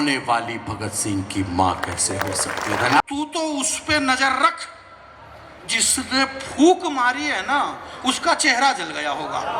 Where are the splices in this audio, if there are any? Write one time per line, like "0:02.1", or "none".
0:03.0